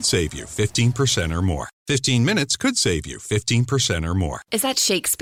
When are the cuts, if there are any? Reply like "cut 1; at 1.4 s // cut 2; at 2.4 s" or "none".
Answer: none